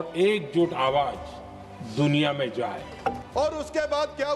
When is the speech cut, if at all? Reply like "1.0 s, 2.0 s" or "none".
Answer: 3.2 s